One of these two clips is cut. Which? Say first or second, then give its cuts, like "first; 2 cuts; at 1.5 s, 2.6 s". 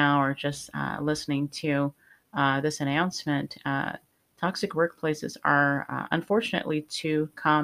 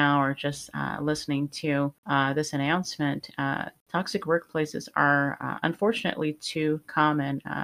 second; 2 cuts; at 2.0 s, 3.7 s